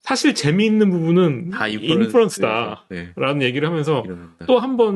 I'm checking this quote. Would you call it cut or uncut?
uncut